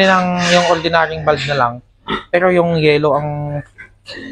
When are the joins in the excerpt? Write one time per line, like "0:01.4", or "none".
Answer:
none